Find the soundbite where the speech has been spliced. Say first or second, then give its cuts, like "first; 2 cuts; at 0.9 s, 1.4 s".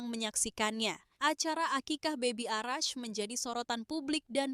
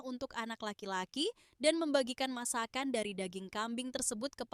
first; 1 cut; at 1.1 s